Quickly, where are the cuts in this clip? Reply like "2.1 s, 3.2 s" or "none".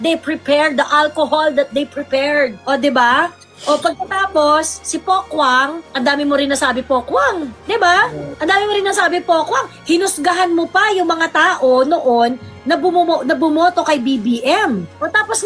none